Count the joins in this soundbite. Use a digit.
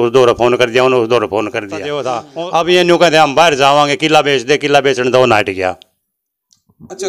1